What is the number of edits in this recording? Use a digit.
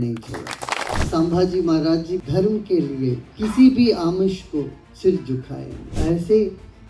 5